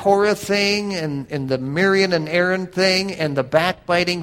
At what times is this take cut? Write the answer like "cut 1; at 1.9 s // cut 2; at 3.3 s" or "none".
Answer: cut 1; at 1.2 s